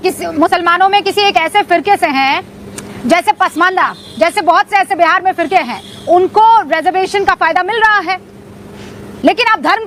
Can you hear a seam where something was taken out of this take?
no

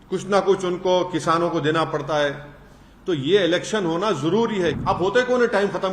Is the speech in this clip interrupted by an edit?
yes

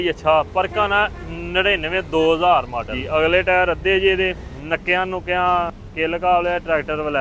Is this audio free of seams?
no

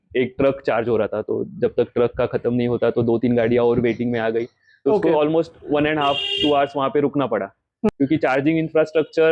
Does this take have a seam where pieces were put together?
yes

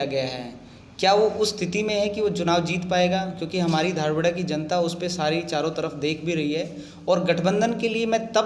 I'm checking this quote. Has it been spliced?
no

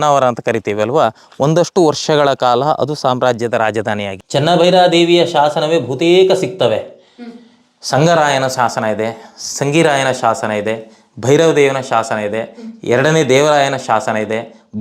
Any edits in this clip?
yes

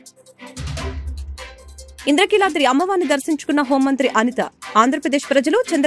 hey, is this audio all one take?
no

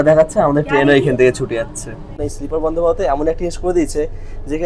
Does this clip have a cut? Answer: yes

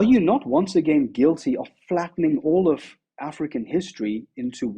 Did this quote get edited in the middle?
no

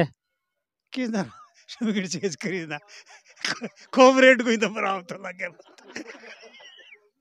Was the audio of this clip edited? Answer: no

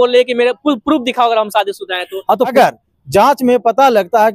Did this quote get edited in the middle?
yes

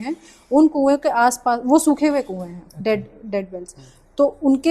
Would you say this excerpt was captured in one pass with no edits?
yes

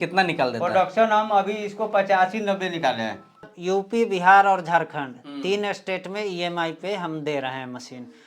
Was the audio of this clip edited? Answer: yes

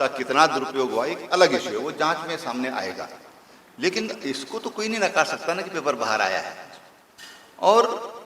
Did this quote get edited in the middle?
no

